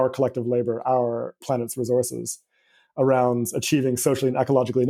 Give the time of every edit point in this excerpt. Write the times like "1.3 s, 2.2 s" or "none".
none